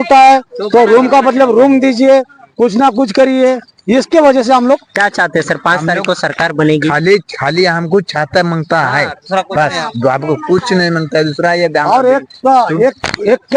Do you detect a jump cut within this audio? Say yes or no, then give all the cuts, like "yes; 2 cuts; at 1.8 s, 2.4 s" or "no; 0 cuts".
no; 0 cuts